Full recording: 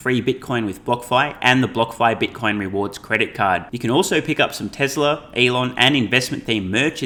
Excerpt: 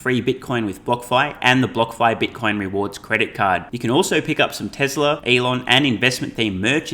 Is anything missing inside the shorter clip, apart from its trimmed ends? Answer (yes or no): yes